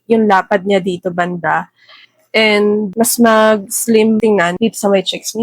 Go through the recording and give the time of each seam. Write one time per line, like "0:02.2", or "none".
0:02.9
0:04.4